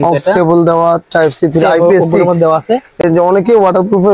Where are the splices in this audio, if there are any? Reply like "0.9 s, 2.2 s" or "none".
none